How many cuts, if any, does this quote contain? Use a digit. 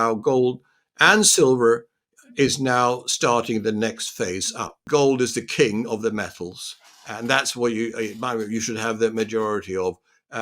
1